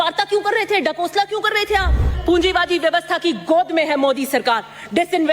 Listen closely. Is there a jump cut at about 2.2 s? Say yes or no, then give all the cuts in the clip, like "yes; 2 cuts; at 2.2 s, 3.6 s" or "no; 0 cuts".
yes; 1 cut; at 2.2 s